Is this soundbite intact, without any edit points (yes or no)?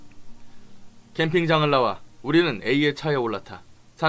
no